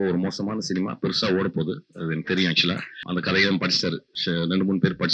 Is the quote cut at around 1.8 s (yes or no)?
no